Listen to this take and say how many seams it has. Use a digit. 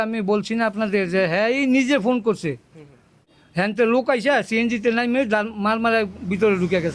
1